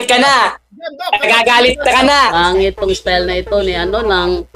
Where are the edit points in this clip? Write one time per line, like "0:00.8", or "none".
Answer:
0:02.3